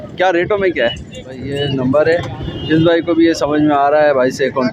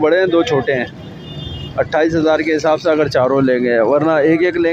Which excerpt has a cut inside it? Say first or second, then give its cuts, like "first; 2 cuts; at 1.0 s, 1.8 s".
first; 1 cut; at 1.5 s